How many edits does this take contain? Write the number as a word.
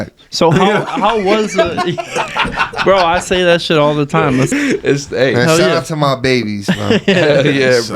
one